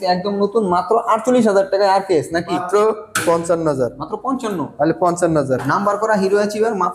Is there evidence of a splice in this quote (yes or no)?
yes